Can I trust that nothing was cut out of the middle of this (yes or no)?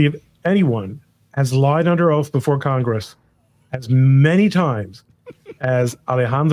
yes